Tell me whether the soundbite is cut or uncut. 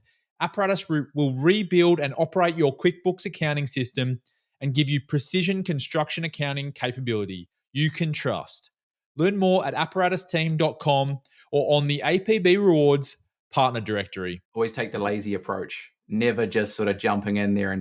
cut